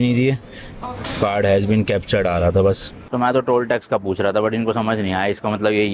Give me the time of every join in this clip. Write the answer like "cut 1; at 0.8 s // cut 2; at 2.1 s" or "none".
cut 1; at 3.0 s